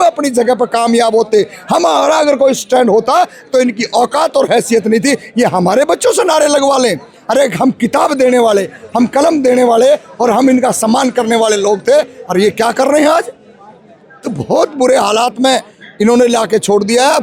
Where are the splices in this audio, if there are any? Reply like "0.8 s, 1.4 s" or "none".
none

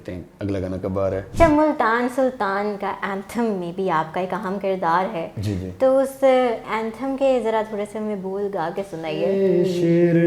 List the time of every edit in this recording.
1.3 s, 9.3 s

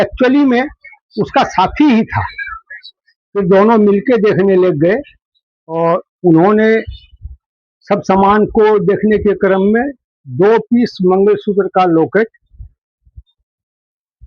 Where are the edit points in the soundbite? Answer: none

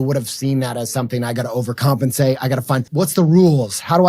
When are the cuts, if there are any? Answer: 2.9 s

